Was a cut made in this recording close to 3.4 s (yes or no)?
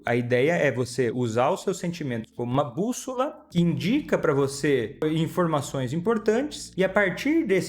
yes